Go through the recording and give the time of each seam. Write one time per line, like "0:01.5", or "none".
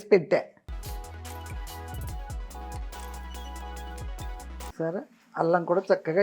0:04.7